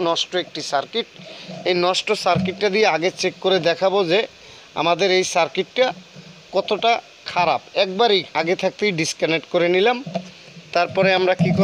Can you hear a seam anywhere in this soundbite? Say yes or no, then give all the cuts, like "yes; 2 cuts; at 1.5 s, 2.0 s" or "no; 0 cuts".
yes; 1 cut; at 8.3 s